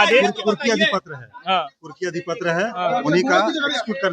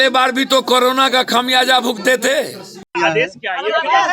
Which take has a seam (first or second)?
second